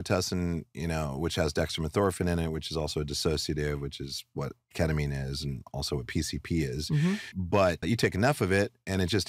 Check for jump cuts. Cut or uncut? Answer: cut